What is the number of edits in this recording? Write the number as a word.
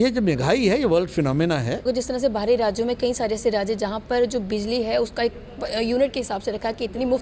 one